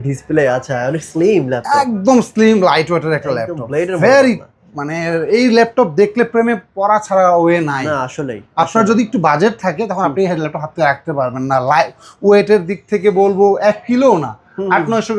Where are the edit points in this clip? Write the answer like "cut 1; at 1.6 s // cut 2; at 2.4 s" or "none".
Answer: none